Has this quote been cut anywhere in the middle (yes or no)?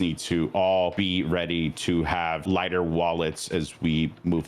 yes